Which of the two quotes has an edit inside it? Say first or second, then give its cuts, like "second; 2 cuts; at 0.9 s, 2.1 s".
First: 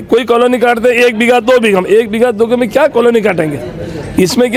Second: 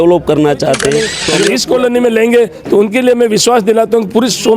second; 1 cut; at 1.3 s